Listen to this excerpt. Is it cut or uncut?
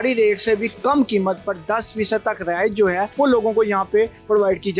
cut